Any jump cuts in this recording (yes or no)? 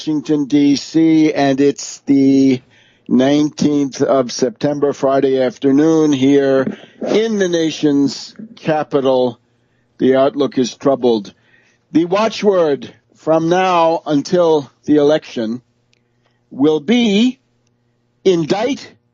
no